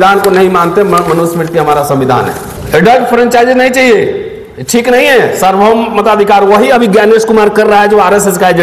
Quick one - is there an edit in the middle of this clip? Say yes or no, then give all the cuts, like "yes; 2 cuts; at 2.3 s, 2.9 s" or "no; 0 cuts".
yes; 1 cut; at 2.5 s